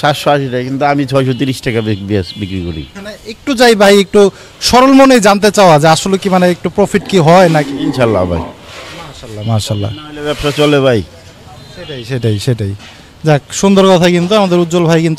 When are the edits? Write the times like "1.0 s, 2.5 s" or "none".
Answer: none